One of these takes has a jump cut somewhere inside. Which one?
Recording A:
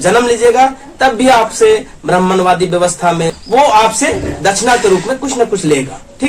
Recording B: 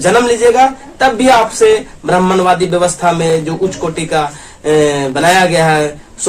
A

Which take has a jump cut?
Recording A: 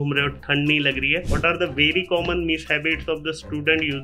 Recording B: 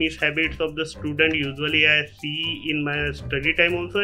A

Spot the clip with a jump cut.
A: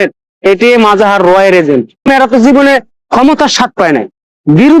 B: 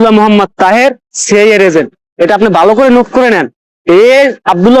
A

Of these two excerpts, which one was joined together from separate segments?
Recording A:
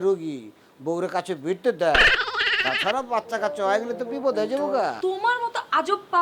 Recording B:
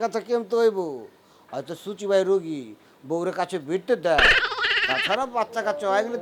A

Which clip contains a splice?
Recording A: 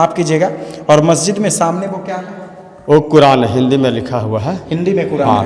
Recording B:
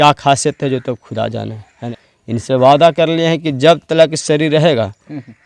B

